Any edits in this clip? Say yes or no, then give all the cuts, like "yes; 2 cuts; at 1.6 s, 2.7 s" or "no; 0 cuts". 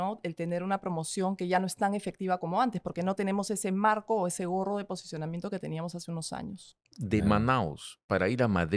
yes; 1 cut; at 6.7 s